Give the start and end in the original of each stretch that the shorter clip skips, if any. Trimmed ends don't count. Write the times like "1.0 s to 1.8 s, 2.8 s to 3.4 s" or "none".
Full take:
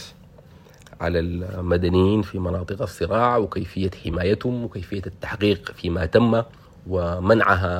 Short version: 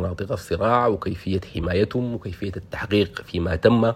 none